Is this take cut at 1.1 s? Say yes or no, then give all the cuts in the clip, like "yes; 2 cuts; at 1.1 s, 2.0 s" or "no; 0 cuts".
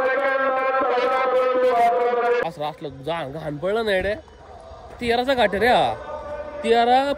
no; 1 cut; at 2.4 s